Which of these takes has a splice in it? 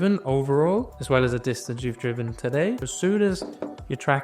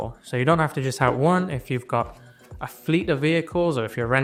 first; 2 cuts; at 0.9 s, 2.9 s

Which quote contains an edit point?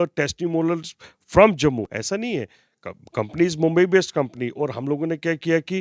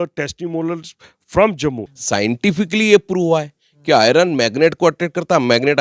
second; 1 cut; at 1.9 s

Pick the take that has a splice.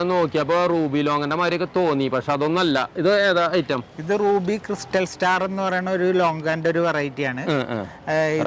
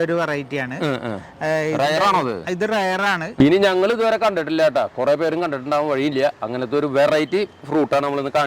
second; 1 cut; at 3.3 s

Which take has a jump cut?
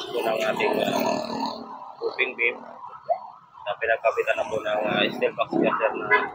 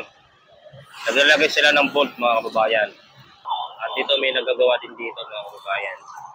second; 1 cut; at 3.4 s

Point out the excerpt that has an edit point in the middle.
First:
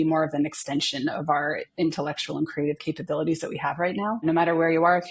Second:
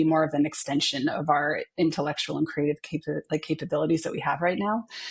first; 2 cuts; at 2.8 s, 4.2 s

